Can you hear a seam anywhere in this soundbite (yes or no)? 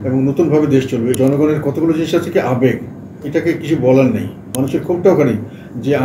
yes